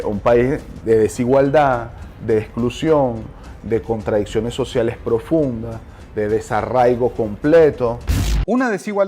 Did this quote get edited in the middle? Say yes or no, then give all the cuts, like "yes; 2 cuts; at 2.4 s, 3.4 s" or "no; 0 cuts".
no; 0 cuts